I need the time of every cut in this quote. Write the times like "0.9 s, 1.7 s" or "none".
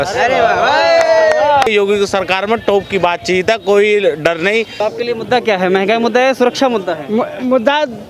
1.7 s, 4.7 s

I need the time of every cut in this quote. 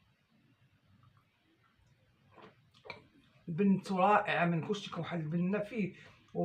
none

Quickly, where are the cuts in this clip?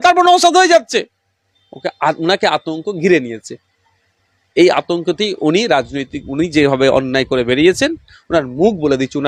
none

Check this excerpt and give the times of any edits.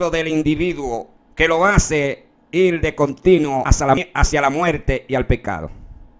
1.2 s, 3.9 s

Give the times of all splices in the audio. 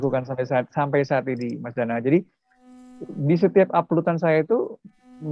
none

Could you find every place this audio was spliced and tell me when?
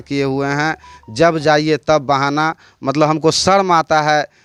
none

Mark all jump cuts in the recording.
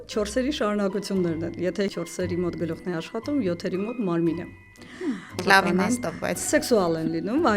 1.9 s, 5.4 s

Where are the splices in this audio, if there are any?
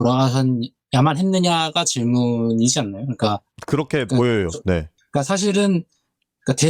3.5 s, 5.0 s

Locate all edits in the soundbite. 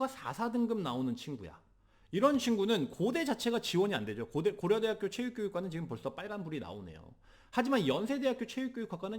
none

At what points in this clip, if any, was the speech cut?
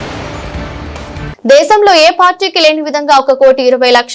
1.3 s

